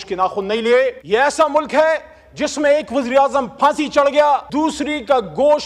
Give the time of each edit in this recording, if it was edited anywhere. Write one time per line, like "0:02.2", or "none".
0:01.0
0:04.5

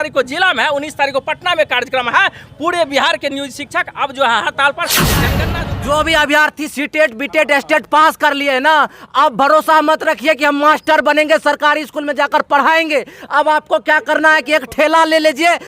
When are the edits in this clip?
0:05.4

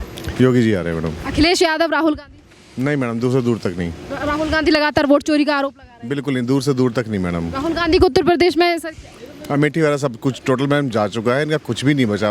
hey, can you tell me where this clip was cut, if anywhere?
none

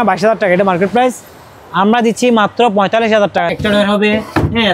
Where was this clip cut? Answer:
0:03.5

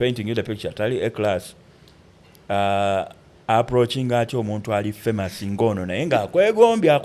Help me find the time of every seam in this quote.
none

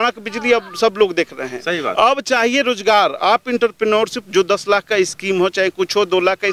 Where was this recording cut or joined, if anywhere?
none

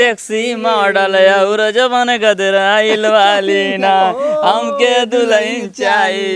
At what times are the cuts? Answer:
none

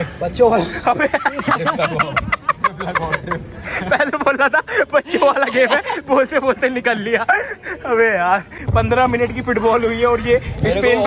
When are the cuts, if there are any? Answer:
0:08.6

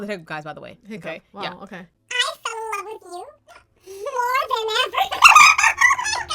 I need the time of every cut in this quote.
0:02.4

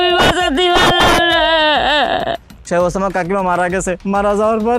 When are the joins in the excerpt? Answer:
0:02.5

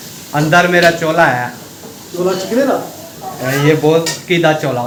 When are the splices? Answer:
none

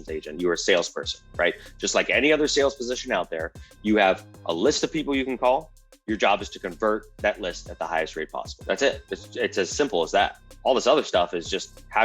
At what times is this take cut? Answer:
0:08.5

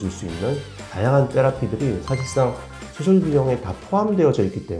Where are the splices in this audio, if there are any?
none

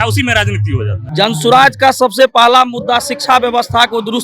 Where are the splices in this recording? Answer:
0:01.0

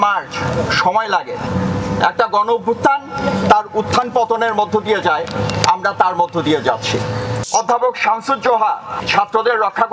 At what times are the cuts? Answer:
0:01.5
0:07.4
0:08.9

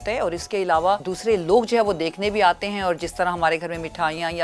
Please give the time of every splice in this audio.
0:01.1

